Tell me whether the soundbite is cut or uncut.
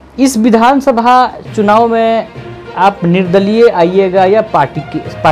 uncut